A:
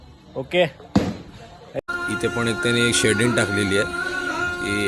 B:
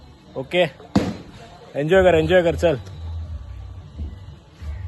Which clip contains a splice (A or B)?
A